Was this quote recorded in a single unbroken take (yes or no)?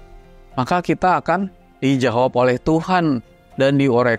no